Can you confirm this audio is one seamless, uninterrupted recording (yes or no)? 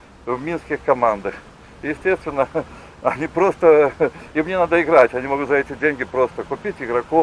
yes